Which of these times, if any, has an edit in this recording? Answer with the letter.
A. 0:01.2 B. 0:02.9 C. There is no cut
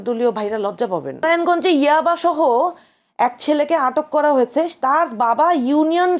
A